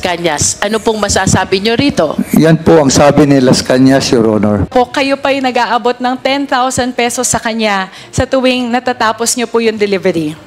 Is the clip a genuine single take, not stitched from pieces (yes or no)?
no